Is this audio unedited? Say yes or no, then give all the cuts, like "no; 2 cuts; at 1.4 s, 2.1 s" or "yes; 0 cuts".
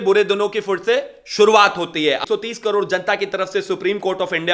no; 1 cut; at 2.2 s